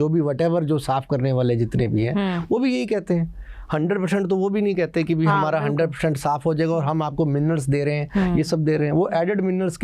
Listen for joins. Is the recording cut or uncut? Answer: uncut